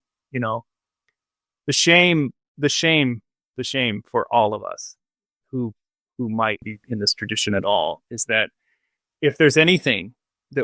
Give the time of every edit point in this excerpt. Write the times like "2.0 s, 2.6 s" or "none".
6.7 s